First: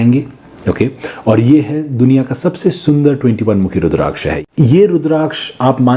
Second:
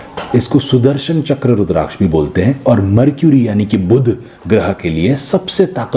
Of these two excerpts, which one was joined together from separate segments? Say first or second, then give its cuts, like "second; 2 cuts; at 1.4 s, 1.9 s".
first; 1 cut; at 4.3 s